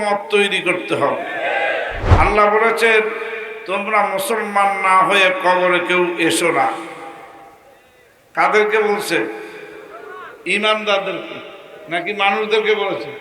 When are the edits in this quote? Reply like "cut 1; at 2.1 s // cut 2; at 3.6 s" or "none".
cut 1; at 2.0 s

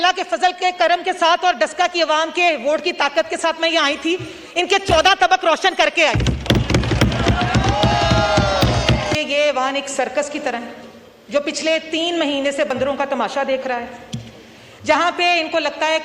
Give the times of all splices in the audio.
cut 1; at 9.1 s

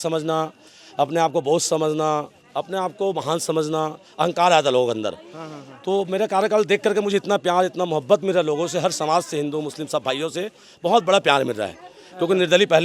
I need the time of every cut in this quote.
none

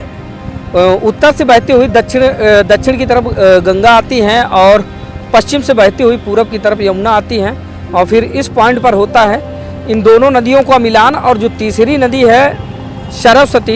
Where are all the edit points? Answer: none

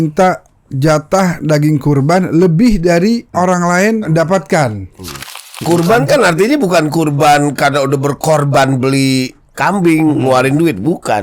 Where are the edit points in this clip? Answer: cut 1; at 3.3 s // cut 2; at 4.1 s // cut 3; at 5.5 s

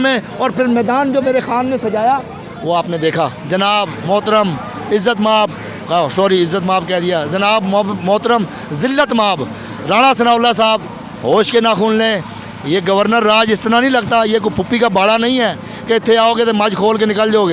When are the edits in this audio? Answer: cut 1; at 3.4 s

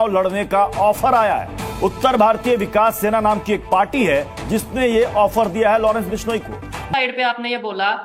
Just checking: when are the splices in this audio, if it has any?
cut 1; at 6.7 s

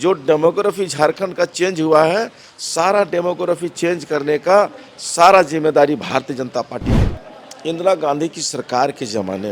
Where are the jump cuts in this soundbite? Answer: cut 1; at 7.1 s

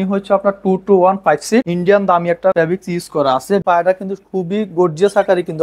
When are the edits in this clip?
cut 1; at 1.7 s // cut 2; at 2.5 s // cut 3; at 3.6 s

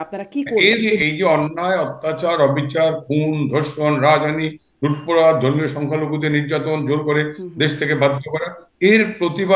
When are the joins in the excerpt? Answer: cut 1; at 1.0 s

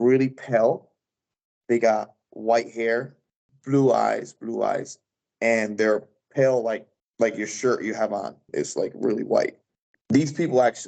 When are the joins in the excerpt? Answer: cut 1; at 8.5 s // cut 2; at 9.9 s

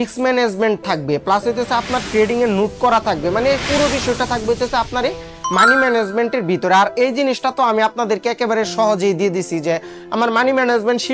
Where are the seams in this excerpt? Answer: none

